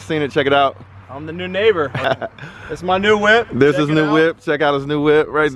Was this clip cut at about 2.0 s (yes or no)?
no